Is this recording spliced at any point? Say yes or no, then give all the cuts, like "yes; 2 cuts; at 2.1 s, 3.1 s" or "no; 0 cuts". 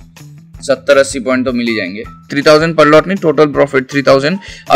yes; 1 cut; at 2.3 s